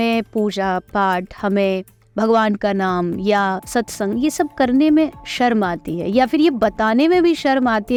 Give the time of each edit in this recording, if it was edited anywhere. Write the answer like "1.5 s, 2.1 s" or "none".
none

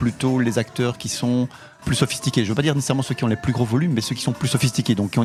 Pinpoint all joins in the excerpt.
none

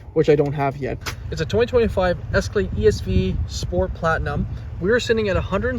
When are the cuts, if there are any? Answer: 0.9 s

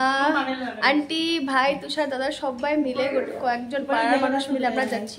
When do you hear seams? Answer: none

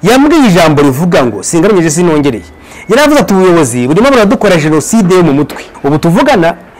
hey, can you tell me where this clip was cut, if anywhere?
5.6 s

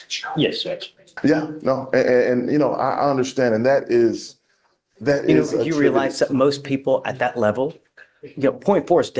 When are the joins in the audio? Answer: 1.1 s

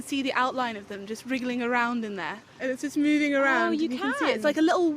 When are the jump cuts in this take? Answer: 2.5 s

